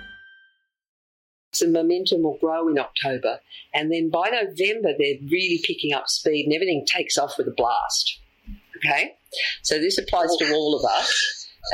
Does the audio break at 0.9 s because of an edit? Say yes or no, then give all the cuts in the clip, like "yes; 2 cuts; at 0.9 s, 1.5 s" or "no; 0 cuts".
yes; 1 cut; at 0.9 s